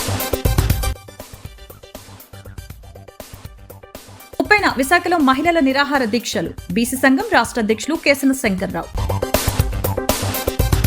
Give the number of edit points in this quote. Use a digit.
1